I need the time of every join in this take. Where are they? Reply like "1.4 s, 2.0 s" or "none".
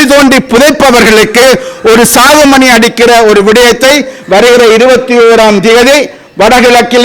none